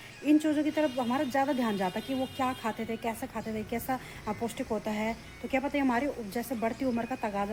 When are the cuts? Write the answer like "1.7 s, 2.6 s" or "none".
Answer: none